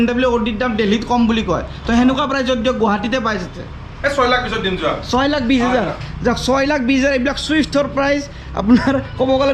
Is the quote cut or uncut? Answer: uncut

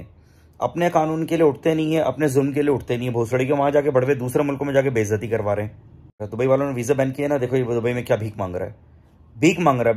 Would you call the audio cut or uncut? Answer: cut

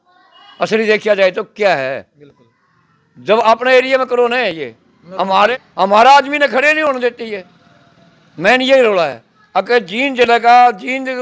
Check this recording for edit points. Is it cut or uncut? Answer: uncut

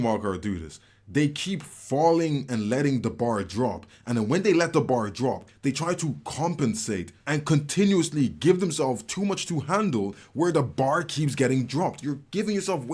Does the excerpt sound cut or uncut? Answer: uncut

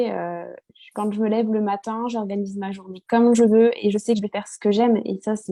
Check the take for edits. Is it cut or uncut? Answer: uncut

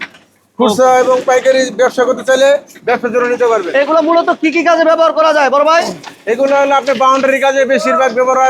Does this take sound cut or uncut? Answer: uncut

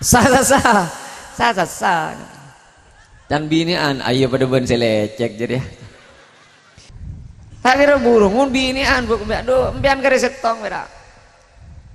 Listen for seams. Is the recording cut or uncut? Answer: cut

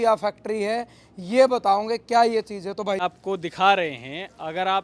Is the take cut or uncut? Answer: cut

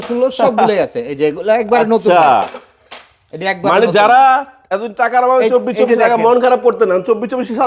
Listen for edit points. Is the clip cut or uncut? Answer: uncut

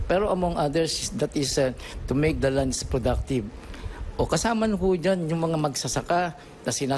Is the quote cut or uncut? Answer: uncut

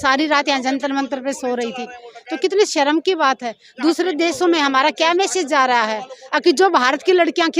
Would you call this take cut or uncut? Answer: uncut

